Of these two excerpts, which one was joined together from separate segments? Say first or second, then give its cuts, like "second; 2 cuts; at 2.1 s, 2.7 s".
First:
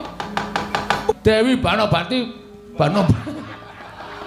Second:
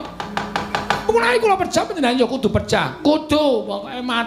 first; 1 cut; at 1.1 s